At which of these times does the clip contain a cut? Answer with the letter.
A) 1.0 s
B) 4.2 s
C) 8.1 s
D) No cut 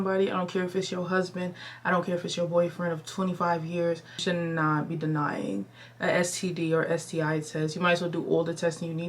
B